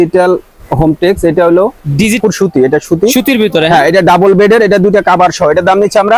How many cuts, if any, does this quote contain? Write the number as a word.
one